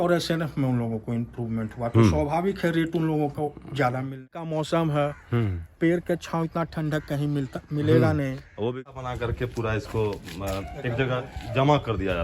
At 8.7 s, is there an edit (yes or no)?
yes